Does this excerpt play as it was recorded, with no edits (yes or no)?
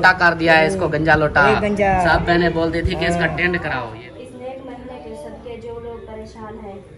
no